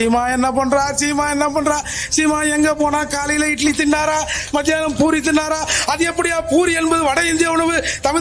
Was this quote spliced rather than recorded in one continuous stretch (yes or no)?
no